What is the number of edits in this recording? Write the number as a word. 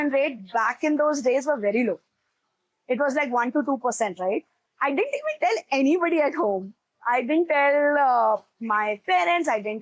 one